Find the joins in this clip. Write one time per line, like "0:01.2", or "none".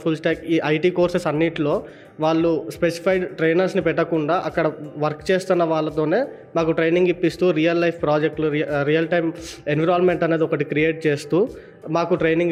none